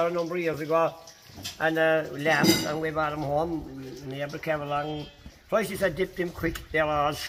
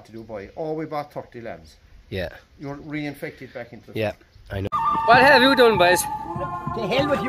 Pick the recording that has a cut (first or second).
second